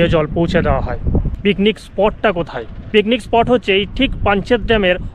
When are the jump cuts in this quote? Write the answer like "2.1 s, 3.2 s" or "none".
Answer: 1.3 s